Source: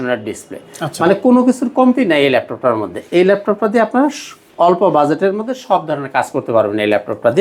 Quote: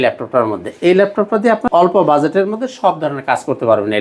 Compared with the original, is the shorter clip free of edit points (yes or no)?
no